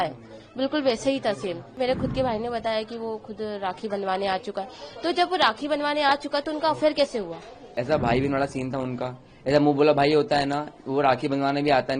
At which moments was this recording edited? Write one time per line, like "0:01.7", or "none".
0:01.7
0:07.7